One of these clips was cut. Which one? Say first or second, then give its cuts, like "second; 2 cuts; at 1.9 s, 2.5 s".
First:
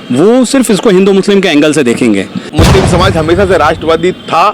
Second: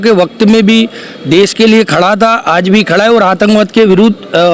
first; 1 cut; at 2.5 s